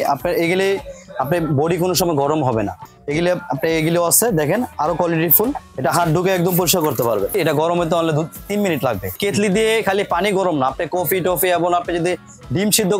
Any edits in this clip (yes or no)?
yes